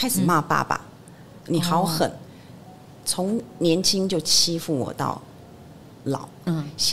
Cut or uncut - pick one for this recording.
uncut